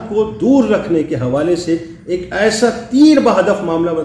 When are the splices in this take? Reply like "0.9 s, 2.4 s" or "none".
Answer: none